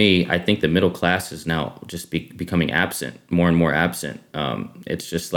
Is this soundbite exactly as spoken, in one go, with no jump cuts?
yes; 0 cuts

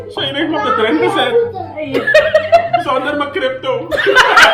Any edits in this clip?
no; 0 cuts

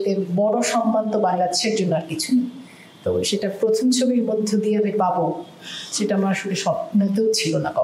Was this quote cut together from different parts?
no; 0 cuts

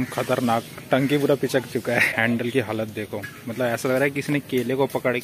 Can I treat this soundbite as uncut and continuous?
no; 1 cut; at 2.1 s

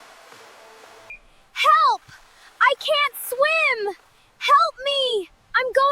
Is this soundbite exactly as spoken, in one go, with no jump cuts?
no; 1 cut; at 1.1 s

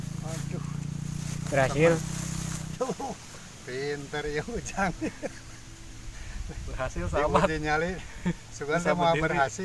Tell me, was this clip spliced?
yes; 1 cut; at 2.7 s

